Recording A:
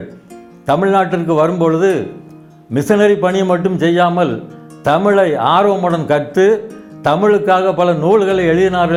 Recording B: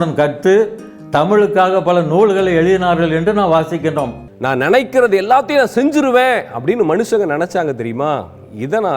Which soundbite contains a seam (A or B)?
B